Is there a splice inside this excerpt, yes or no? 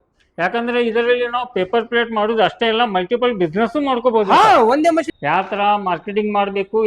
yes